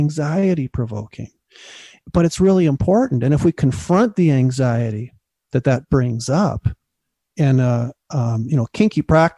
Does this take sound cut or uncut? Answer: cut